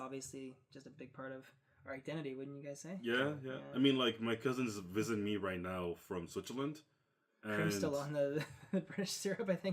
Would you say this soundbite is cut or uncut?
uncut